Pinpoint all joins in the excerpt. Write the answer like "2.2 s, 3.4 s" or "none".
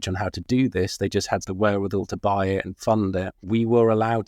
1.5 s, 3.3 s